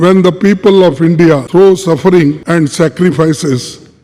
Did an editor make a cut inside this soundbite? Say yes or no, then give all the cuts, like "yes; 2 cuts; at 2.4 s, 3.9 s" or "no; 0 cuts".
yes; 2 cuts; at 1.4 s, 2.4 s